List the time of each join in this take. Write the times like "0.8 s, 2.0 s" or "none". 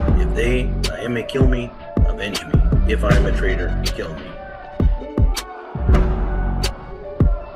4.4 s